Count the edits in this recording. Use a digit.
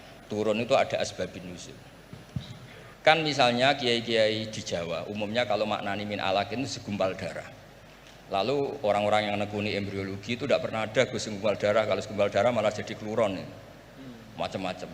1